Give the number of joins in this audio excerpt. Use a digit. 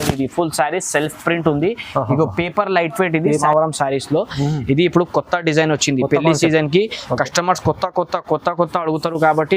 1